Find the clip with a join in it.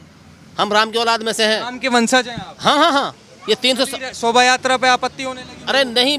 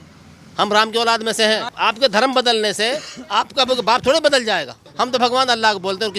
second; 2 cuts; at 1.7 s, 4.8 s

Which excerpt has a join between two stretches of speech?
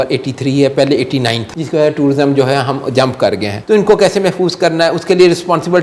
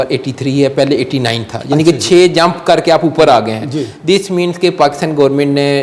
first; 2 cuts; at 1.5 s, 3.5 s

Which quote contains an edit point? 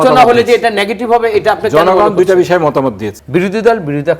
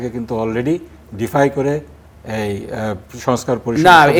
first; 1 cut; at 3.1 s

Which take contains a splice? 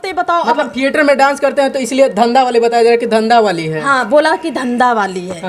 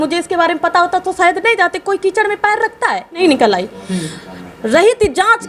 second; 1 cut; at 3.2 s

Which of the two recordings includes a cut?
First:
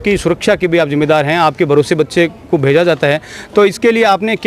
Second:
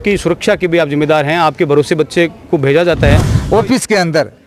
second; 1 cut; at 3.3 s

